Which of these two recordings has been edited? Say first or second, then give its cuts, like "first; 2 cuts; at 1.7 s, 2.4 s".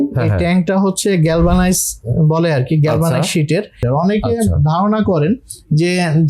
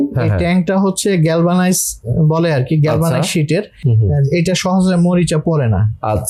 first; 1 cut; at 3.9 s